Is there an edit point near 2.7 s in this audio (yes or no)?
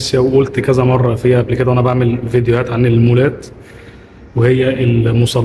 no